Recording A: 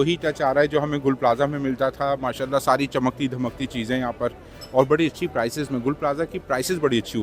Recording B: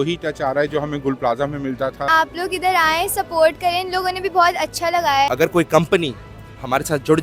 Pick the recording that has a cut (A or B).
B